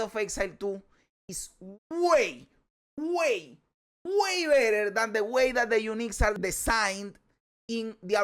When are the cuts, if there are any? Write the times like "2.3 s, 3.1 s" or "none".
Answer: 6.3 s